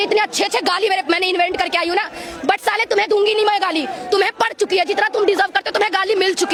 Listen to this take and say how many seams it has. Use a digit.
0